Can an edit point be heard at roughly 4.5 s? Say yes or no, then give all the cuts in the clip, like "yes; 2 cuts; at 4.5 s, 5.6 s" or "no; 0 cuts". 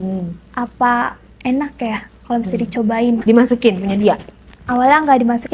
no; 1 cut; at 3.2 s